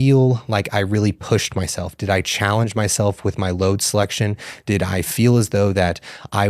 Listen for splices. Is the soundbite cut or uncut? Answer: uncut